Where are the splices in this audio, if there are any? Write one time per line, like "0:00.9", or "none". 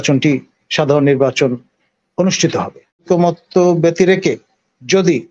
0:03.0